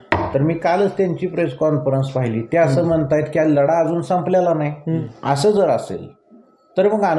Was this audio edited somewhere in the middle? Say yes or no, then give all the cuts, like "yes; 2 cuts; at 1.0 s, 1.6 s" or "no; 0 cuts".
yes; 1 cut; at 5.0 s